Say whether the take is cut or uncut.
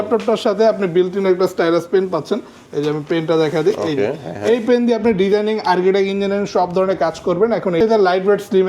cut